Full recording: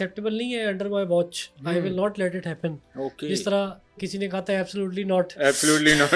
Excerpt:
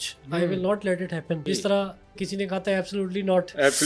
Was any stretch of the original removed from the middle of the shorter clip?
yes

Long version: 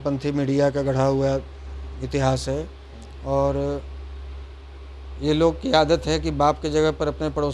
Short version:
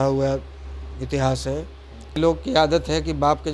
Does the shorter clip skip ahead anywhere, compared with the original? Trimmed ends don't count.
yes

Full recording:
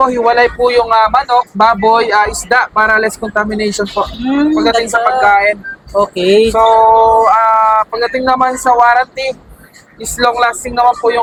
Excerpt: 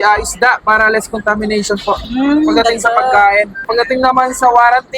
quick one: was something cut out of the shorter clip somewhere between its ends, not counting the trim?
yes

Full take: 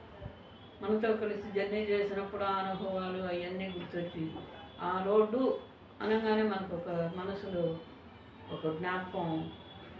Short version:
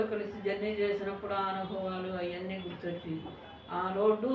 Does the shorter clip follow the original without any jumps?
yes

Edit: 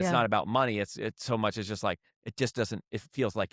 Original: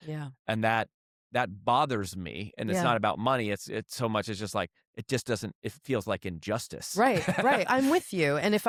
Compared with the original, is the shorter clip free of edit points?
yes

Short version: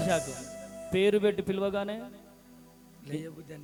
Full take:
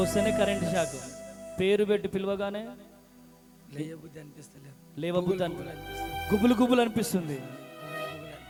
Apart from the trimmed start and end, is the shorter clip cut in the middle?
no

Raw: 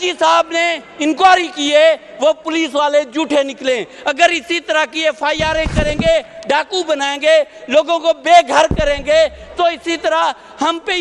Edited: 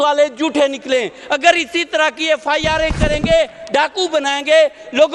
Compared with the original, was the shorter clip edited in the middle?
no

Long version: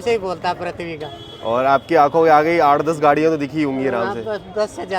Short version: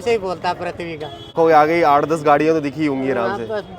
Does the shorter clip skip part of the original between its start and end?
yes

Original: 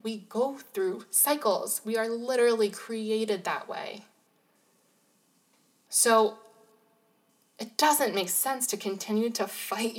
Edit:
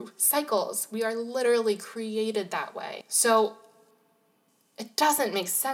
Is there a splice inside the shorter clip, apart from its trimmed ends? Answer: yes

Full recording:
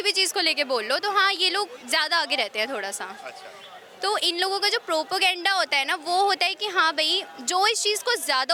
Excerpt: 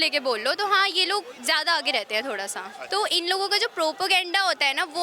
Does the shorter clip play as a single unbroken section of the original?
no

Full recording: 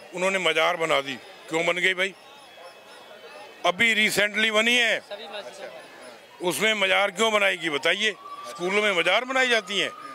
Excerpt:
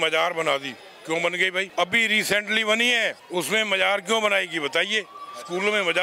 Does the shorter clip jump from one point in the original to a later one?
yes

